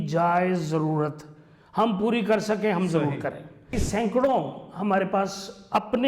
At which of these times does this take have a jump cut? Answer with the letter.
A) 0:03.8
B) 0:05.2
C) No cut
A